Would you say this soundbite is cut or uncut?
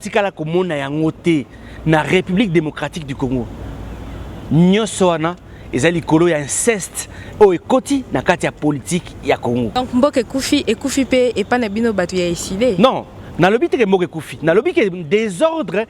cut